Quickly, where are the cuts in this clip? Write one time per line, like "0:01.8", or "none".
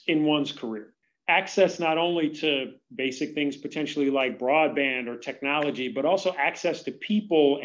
0:01.0